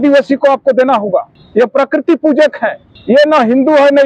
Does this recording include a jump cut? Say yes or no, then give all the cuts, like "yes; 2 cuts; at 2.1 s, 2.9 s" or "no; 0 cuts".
yes; 2 cuts; at 1.4 s, 2.9 s